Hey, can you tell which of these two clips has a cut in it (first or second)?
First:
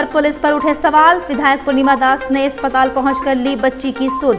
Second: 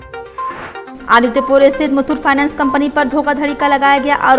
second